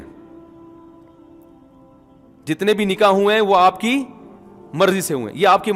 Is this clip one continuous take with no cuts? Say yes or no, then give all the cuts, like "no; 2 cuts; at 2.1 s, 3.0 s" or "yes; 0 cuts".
yes; 0 cuts